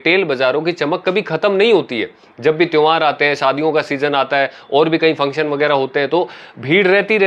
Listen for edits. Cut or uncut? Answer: uncut